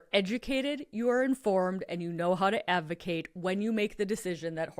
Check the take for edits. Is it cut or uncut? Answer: uncut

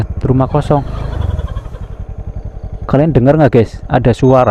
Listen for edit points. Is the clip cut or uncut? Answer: uncut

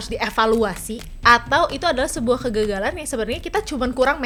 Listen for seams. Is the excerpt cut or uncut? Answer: uncut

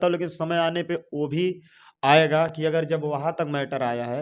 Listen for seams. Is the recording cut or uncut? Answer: uncut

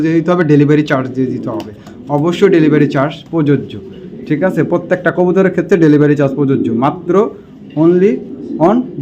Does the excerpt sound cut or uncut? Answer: uncut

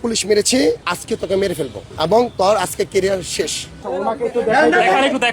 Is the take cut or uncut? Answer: cut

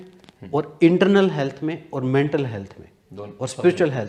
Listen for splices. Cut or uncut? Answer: uncut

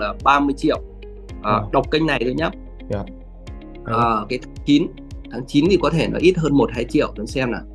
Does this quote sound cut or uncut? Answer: uncut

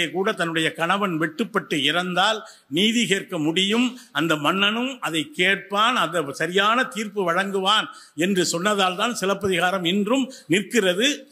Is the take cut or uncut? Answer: uncut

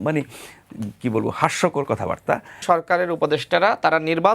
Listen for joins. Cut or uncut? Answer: cut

